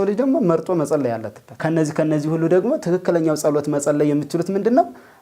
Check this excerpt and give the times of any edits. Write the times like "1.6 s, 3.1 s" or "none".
1.5 s